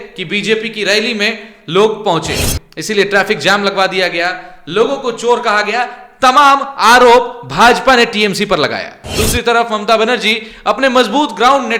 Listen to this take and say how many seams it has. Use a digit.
1